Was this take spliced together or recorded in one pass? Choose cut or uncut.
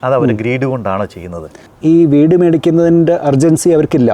cut